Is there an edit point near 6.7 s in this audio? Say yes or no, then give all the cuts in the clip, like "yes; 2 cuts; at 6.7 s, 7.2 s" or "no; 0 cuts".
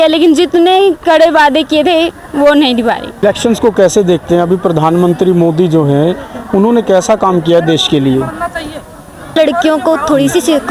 no; 2 cuts; at 3.2 s, 9.3 s